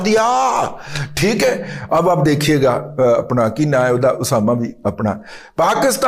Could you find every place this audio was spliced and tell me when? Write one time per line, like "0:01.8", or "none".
none